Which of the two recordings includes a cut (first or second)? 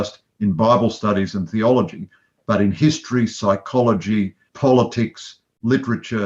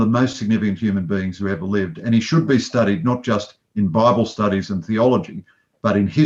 first